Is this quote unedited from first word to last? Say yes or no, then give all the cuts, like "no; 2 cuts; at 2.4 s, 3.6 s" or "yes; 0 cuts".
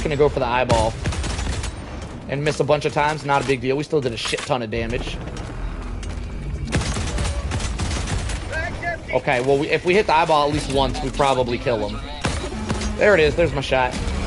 yes; 0 cuts